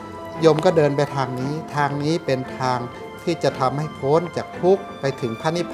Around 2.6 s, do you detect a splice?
no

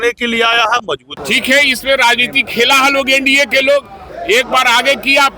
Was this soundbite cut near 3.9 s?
no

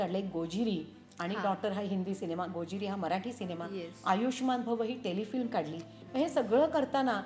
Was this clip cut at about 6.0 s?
yes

